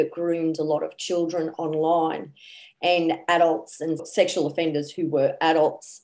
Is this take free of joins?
yes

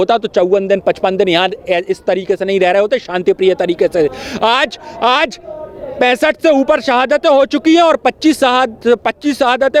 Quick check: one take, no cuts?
yes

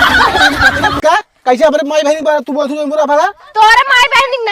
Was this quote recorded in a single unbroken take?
no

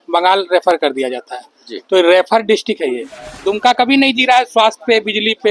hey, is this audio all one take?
no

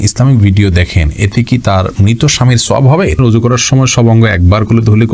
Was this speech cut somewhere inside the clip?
yes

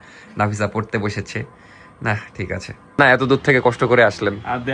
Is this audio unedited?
no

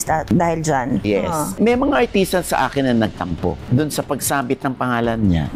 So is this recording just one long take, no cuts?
no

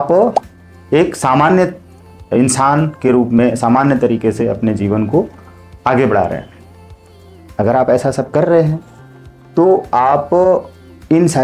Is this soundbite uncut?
yes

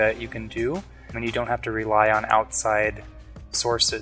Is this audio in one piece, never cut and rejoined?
no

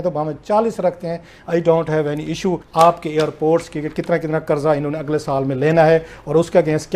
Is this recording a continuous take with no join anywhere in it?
no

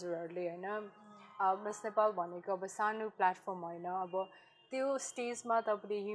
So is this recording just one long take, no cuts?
yes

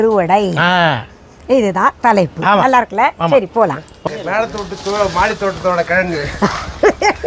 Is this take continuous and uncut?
no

